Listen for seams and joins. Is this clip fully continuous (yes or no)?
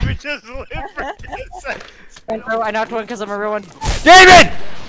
no